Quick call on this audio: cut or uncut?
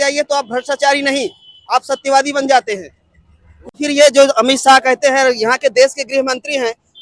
cut